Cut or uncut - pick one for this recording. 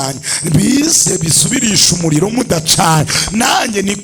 uncut